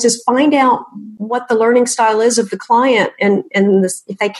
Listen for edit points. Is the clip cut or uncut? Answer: uncut